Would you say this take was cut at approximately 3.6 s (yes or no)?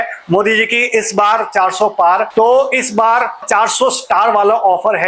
no